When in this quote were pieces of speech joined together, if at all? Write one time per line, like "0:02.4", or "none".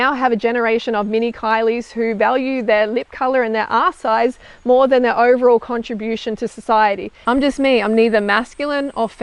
0:07.1